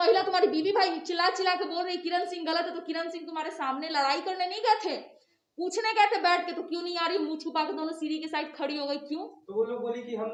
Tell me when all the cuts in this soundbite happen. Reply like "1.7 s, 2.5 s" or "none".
none